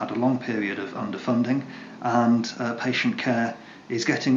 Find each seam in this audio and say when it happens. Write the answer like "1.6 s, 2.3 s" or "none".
none